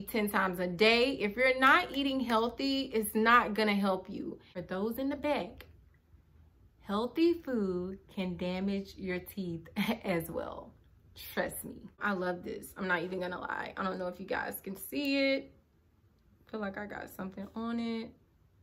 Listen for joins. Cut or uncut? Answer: cut